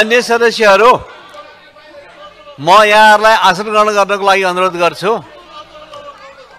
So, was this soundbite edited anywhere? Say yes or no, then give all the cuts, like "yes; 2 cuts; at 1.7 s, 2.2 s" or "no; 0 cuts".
no; 0 cuts